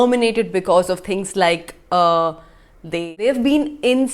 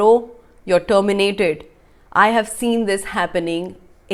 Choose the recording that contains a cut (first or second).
first